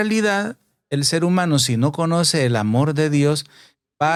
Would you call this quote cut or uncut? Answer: uncut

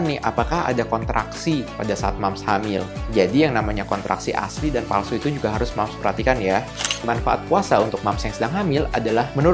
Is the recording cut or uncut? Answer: cut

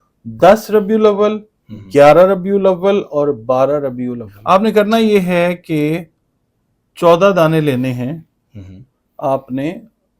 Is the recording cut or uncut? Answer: cut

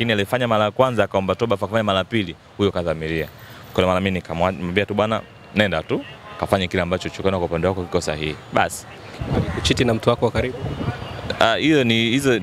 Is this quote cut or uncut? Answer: uncut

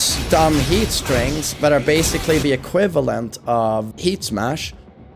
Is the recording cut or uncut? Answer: cut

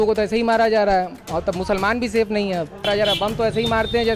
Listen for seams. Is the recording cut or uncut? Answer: cut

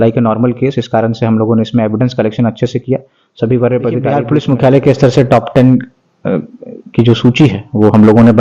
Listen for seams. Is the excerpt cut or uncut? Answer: cut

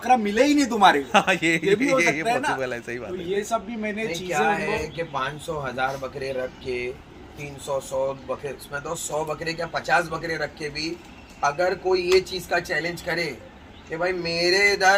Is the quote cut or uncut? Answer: uncut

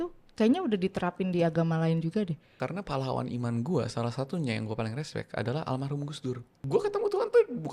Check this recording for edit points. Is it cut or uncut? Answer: cut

